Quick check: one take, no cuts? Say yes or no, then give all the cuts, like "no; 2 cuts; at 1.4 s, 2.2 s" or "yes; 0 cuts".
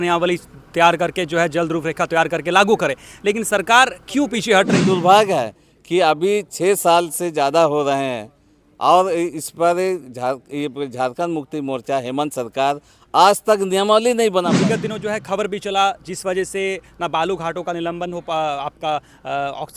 no; 2 cuts; at 4.8 s, 14.5 s